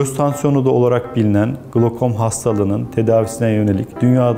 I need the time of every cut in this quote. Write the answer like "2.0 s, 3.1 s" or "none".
none

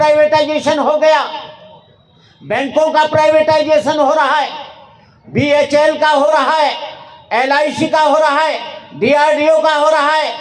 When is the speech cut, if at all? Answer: none

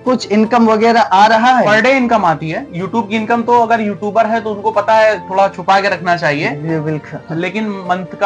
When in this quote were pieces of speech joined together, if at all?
1.7 s

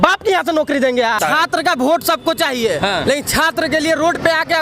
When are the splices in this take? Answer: 1.2 s

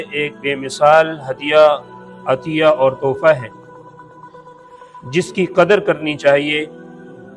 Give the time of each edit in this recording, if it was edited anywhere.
3.4 s, 5.0 s

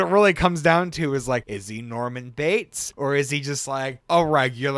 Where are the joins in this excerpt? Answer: 1.5 s, 2.8 s

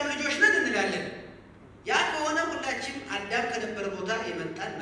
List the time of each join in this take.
none

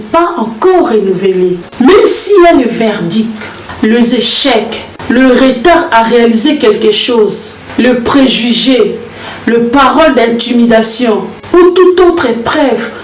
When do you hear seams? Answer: 1.6 s

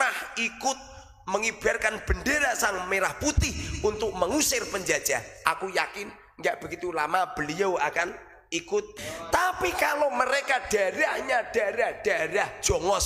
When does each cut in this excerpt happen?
8.9 s

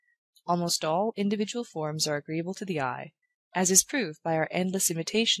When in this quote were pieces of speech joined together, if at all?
none

